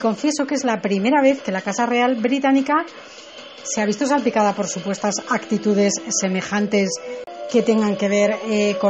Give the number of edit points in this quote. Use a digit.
1